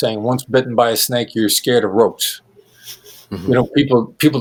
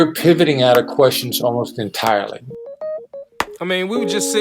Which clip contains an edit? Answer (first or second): second